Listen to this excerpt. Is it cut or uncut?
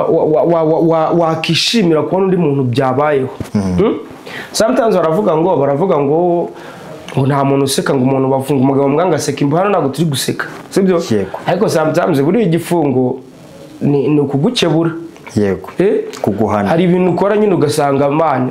uncut